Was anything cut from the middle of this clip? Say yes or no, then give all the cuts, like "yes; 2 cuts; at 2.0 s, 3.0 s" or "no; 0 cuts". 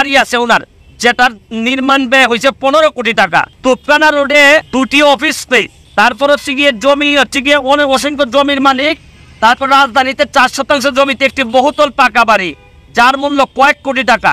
yes; 3 cuts; at 3.5 s, 4.7 s, 5.8 s